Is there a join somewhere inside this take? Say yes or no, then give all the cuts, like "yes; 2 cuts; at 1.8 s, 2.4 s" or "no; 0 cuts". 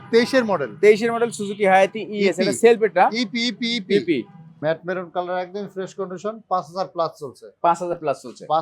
yes; 1 cut; at 4.4 s